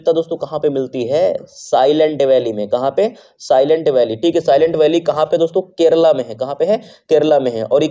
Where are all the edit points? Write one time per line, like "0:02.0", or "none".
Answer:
none